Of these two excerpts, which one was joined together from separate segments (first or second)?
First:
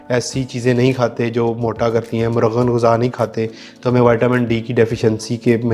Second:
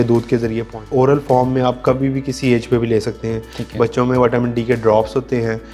second